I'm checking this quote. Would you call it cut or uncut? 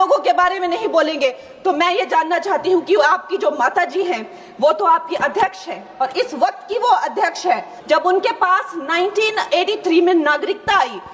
cut